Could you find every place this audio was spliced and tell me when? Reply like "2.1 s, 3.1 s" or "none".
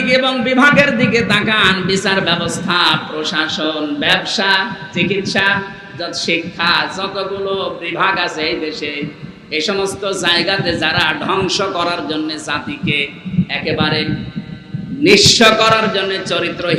none